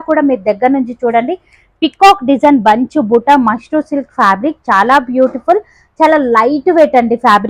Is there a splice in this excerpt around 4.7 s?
no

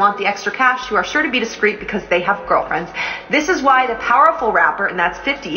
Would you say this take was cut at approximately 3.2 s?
yes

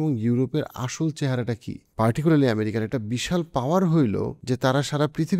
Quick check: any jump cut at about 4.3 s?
yes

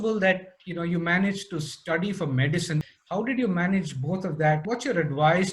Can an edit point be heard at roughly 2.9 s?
yes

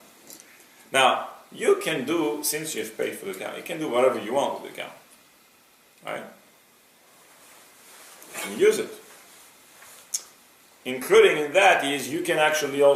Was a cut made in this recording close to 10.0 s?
no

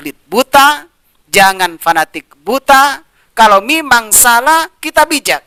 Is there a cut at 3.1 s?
no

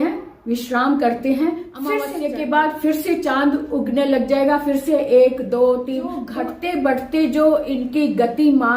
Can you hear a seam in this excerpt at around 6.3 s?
yes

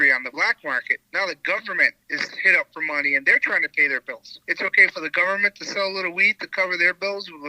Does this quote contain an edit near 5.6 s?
no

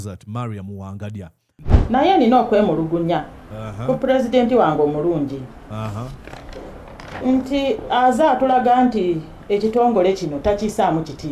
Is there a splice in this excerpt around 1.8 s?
yes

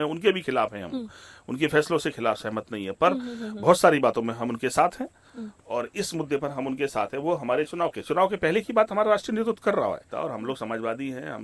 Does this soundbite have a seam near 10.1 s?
yes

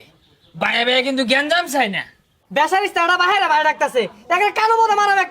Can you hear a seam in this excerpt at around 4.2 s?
no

